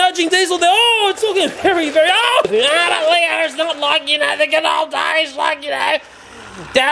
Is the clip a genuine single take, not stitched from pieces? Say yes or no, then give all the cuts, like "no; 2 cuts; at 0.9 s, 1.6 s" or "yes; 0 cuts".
no; 1 cut; at 2.5 s